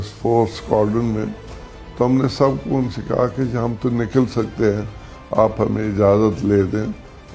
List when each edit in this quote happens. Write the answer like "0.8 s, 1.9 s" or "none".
none